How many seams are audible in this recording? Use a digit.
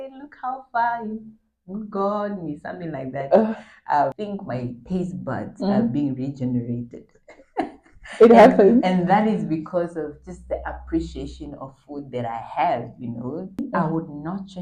2